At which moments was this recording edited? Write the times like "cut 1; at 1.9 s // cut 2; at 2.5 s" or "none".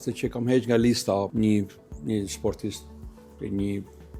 cut 1; at 1.3 s